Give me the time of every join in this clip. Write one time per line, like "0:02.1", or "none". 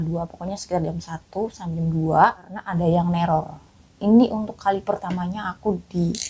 0:02.6